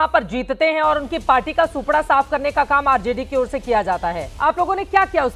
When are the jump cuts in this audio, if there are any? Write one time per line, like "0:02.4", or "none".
0:04.3